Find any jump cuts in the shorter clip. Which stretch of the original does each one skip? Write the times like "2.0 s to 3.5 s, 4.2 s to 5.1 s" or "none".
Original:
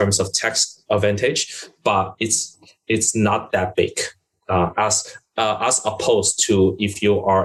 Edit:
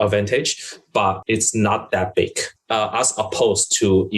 2.1 s to 2.8 s, 4.1 s to 5.2 s